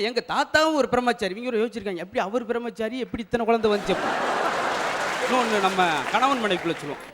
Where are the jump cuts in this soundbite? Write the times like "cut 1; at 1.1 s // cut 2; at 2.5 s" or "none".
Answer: none